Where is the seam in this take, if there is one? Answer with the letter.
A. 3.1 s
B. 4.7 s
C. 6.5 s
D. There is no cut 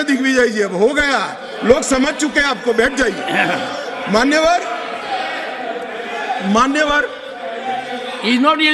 D